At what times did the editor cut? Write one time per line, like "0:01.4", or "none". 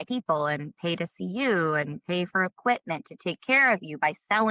none